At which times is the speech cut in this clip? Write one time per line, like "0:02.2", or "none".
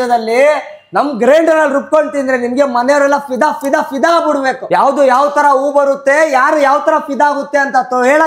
none